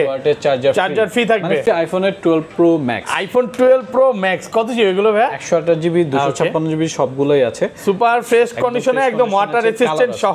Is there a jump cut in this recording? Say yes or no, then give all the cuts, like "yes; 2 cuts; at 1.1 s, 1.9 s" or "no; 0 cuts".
yes; 1 cut; at 1.7 s